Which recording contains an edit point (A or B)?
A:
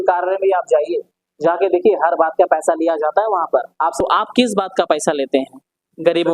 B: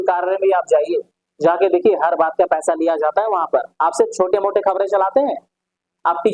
A